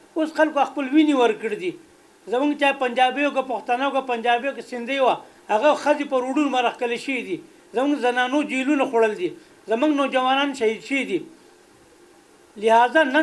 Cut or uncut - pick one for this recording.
uncut